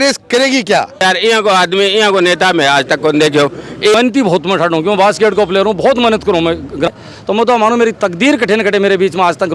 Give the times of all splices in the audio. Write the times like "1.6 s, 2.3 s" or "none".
1.0 s, 3.9 s, 6.9 s